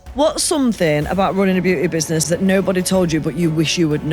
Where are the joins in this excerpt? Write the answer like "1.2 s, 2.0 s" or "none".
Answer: 2.3 s